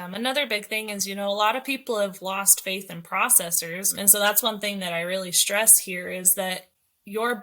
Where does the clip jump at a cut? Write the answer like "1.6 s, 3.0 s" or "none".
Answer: 3.9 s